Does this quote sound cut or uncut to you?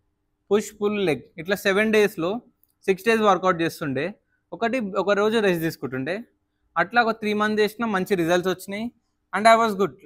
uncut